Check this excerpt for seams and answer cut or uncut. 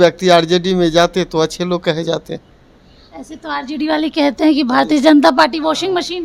uncut